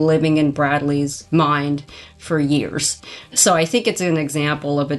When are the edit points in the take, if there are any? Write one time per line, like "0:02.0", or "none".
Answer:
0:01.2
0:03.0